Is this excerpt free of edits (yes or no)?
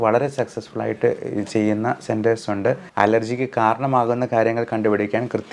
no